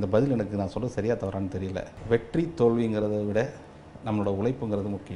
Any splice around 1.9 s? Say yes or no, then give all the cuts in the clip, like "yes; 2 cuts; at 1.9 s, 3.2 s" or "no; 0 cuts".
yes; 1 cut; at 1.9 s